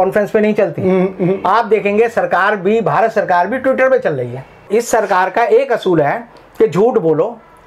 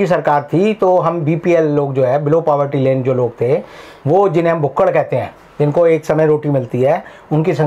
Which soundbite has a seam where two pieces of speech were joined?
first; 1 cut; at 4.6 s

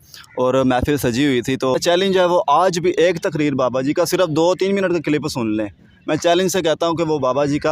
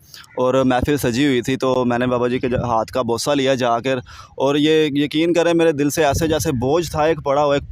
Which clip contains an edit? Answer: first; 1 cut; at 1.8 s

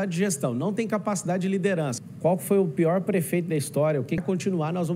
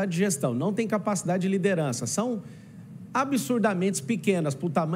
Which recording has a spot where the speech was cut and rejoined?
first; 2 cuts; at 2.0 s, 4.2 s

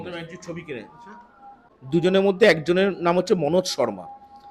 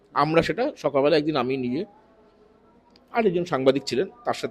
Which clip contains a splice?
first; 1 cut; at 1.7 s

